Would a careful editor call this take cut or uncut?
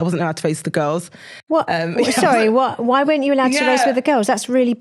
uncut